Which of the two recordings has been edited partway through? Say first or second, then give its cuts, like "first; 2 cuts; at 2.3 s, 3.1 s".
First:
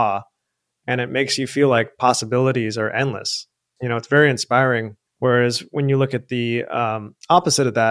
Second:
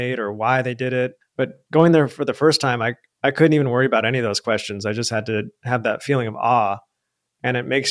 second; 1 cut; at 1.2 s